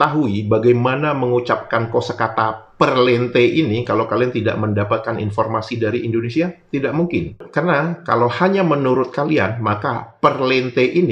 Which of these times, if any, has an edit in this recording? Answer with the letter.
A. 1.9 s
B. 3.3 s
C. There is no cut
C